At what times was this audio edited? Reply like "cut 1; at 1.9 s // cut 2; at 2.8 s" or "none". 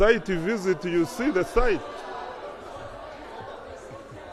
none